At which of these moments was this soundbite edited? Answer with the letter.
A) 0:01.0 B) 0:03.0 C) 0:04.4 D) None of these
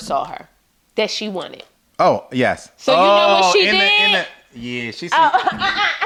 D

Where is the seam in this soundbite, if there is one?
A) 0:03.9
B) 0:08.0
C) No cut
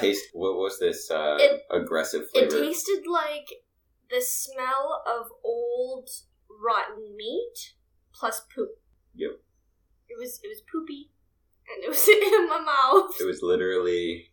B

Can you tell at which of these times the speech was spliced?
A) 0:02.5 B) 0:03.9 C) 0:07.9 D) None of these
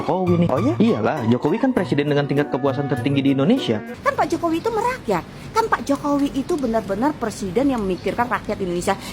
B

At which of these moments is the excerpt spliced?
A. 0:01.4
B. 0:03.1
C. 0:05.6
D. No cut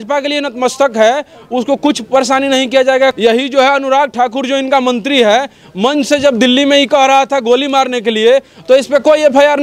B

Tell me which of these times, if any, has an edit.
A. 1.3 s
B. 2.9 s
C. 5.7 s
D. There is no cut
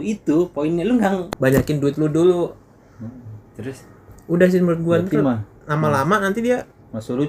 A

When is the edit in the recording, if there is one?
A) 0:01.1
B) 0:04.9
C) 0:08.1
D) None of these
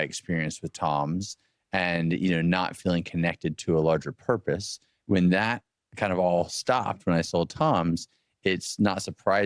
B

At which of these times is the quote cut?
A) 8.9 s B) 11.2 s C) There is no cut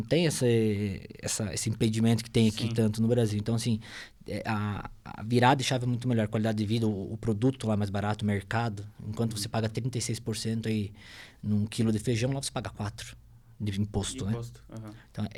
C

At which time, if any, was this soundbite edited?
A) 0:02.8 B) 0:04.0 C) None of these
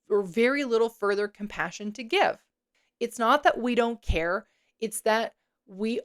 A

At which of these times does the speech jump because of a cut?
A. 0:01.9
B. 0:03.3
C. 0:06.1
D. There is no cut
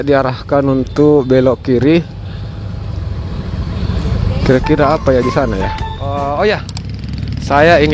C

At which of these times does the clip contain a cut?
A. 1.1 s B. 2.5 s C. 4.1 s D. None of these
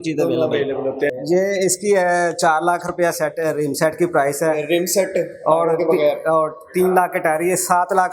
A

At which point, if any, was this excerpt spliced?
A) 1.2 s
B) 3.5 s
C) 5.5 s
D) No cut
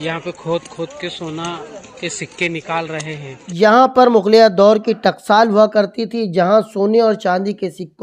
B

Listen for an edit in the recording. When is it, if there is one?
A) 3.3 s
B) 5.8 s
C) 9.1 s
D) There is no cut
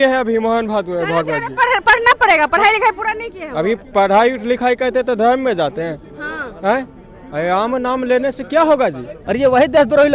C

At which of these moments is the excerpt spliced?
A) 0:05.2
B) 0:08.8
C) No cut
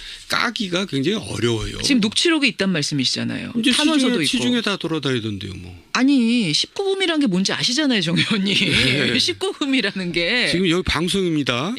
A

